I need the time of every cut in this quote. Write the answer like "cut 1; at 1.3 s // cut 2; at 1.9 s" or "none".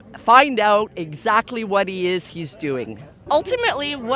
cut 1; at 3.1 s